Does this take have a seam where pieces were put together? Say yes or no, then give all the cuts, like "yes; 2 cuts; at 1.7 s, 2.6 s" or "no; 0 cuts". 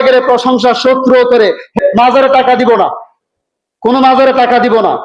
yes; 1 cut; at 1.8 s